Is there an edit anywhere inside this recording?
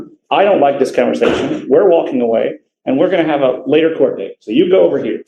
no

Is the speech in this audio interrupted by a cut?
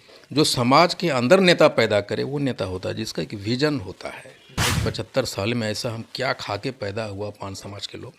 yes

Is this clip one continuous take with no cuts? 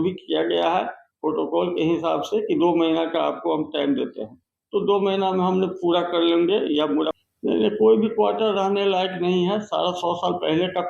no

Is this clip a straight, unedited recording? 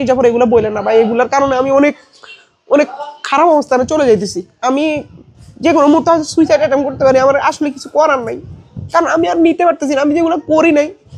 yes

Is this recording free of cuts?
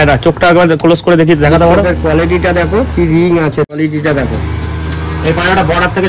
no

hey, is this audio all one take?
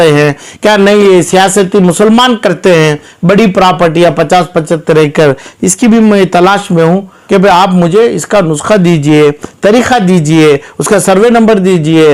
no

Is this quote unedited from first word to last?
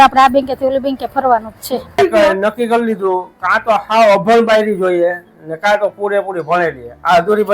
no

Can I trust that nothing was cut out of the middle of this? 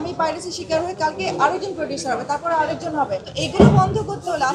no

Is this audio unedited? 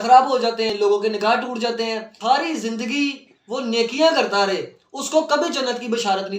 no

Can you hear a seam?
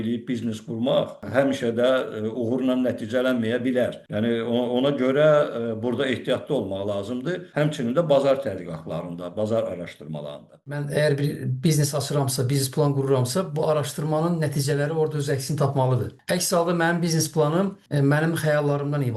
yes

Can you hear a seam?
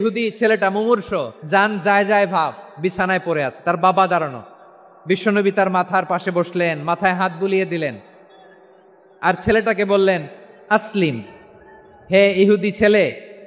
yes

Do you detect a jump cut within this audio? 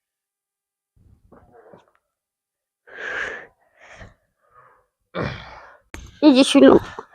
yes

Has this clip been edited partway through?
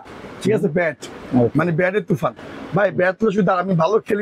no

